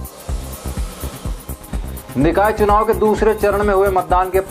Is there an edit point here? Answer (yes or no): yes